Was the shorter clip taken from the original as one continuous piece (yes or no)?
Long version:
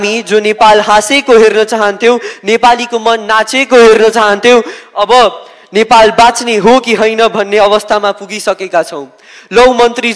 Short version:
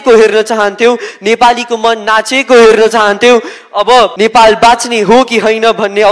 no